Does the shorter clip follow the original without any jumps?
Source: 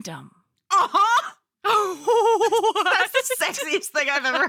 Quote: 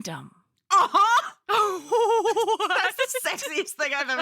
no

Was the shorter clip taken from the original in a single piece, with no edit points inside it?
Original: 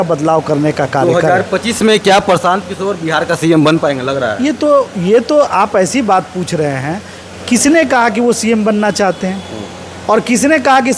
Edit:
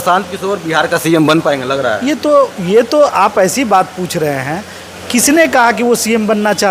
yes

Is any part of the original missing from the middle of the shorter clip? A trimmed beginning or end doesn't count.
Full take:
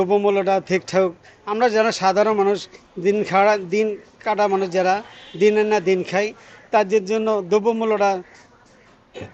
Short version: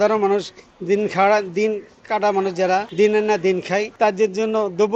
yes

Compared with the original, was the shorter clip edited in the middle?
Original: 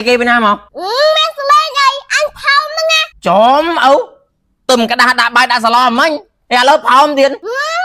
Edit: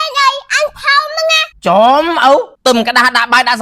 yes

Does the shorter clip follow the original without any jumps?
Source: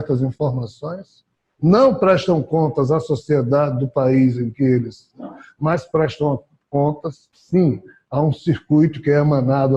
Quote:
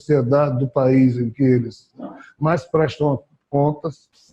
yes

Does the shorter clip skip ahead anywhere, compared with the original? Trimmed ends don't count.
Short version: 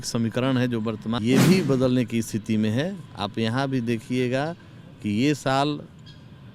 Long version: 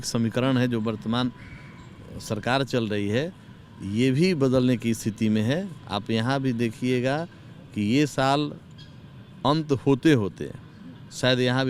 yes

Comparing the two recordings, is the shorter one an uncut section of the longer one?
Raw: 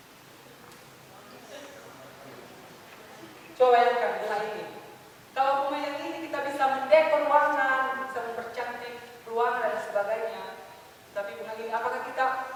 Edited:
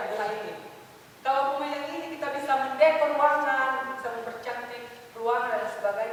yes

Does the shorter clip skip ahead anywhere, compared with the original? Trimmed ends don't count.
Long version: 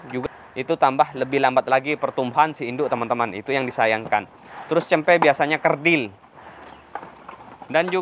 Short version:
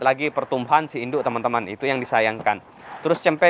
no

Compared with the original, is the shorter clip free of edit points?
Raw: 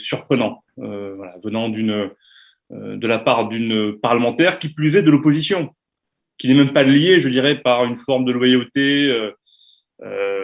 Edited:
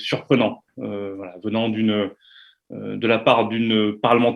yes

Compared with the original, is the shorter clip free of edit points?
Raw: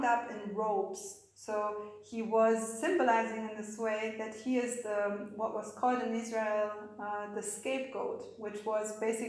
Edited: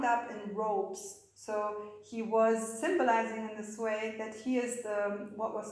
yes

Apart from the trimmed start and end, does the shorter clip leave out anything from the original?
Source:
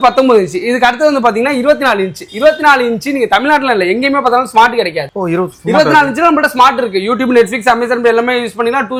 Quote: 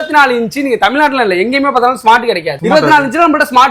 yes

